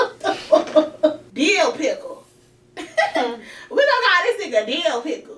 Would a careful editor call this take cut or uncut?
cut